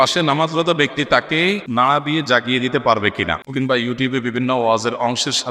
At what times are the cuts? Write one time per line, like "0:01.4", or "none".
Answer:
0:01.6
0:03.4